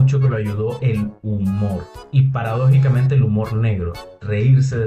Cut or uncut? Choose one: uncut